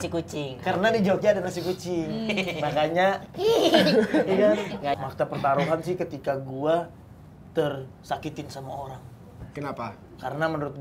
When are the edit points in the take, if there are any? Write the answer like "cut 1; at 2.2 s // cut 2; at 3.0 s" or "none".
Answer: cut 1; at 5.0 s